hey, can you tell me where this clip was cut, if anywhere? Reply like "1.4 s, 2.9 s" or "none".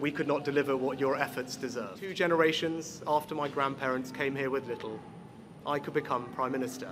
2.0 s